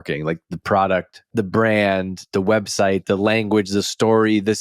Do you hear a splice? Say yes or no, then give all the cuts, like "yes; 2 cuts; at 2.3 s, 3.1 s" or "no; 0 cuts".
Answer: yes; 1 cut; at 1.2 s